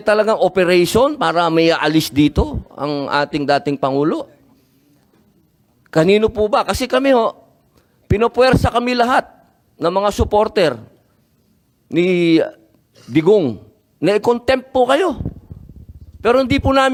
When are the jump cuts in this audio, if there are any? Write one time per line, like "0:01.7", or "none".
none

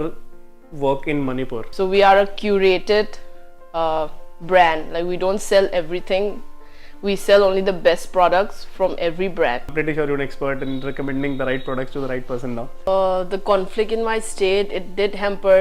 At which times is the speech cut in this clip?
0:01.7
0:09.7
0:12.9

